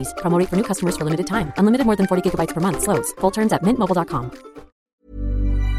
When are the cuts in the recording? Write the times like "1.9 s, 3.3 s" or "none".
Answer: 4.8 s